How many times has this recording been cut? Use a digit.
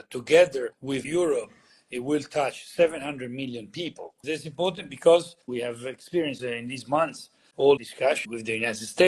4